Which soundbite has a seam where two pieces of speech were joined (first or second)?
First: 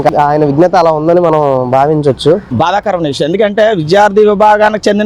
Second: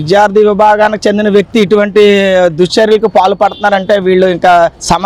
first